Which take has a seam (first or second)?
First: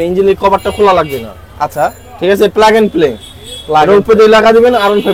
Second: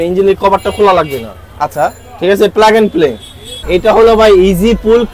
second